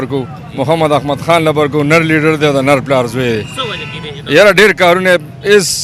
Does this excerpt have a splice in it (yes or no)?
no